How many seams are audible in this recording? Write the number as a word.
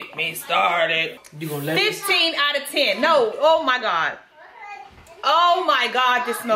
one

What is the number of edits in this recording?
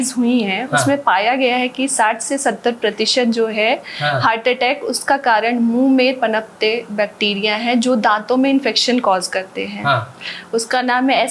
zero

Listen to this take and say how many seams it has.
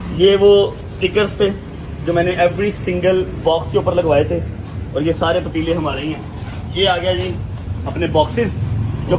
zero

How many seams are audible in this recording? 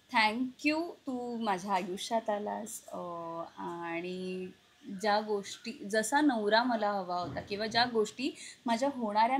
zero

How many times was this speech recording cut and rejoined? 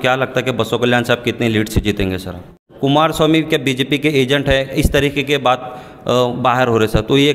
one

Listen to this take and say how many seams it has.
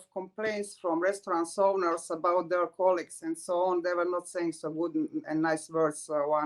zero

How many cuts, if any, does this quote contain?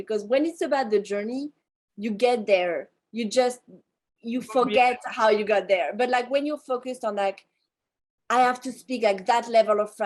zero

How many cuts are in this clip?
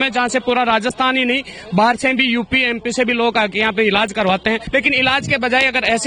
one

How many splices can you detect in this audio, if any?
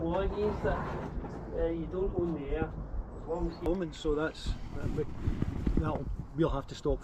one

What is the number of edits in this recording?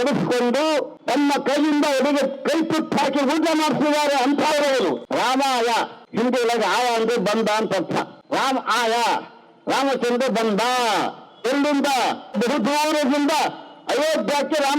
five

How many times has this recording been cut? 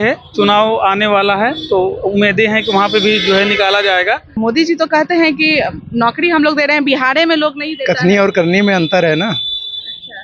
one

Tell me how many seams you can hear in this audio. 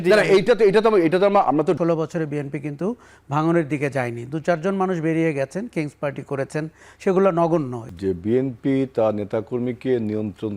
two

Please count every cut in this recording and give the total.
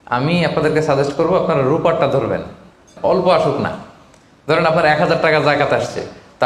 one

